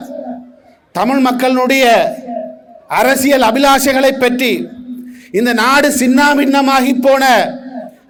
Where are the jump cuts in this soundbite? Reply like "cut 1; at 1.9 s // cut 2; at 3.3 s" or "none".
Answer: none